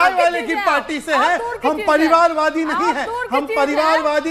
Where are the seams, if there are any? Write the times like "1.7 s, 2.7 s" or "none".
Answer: none